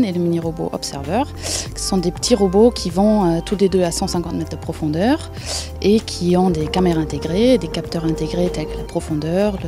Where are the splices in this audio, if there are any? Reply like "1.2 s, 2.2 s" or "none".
2.3 s